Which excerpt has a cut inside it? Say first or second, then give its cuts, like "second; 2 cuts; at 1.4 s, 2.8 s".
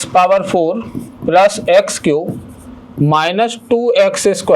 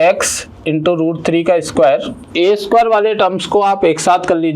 second; 1 cut; at 2.2 s